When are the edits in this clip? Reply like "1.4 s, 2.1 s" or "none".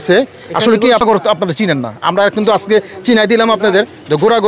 1.0 s